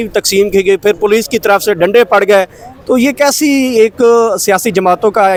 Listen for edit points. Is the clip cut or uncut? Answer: uncut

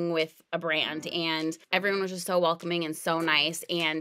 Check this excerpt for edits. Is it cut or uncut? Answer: cut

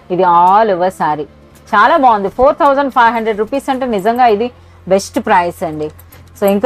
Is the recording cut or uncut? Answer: uncut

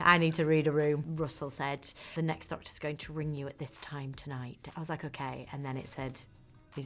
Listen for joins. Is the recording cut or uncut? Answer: cut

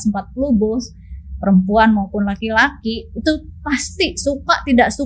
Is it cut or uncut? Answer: uncut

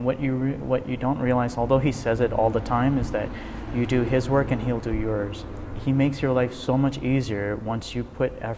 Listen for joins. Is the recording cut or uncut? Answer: uncut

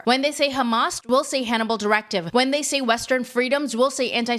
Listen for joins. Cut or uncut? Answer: cut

